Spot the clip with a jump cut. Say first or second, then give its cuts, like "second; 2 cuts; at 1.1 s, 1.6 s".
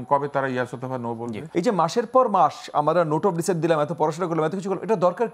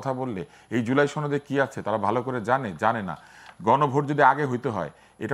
first; 1 cut; at 1.4 s